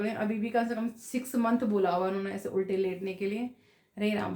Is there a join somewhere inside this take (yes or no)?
no